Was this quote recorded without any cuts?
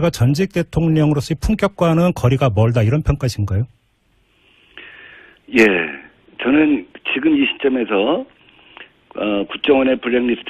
no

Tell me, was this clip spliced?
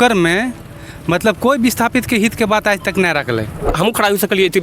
yes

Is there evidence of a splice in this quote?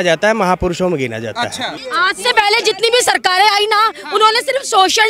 yes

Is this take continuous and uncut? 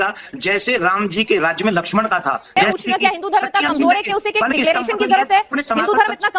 no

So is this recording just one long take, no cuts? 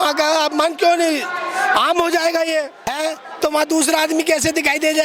no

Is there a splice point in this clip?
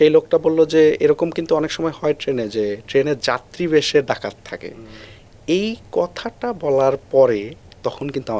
no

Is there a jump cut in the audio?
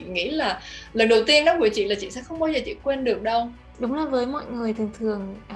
yes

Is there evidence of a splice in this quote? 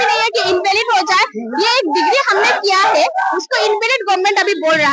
no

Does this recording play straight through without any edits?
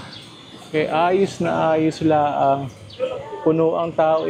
yes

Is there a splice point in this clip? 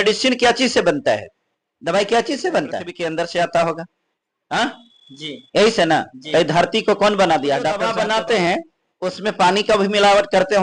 yes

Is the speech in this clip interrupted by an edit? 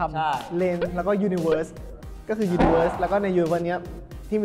no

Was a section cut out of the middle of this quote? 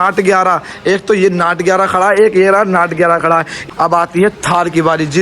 yes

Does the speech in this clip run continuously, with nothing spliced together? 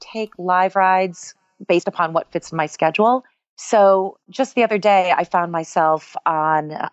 yes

